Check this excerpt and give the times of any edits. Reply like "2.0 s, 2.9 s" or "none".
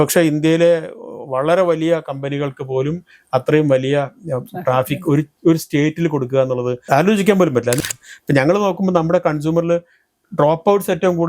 6.8 s, 7.8 s